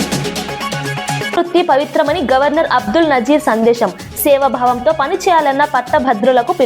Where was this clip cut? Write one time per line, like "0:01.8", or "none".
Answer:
0:01.3

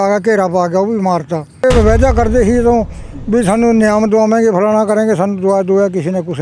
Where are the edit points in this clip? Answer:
0:01.6

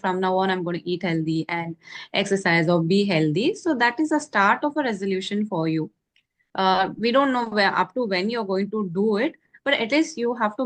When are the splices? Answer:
none

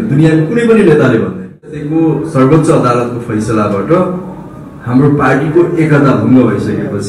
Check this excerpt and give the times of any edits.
0:01.8

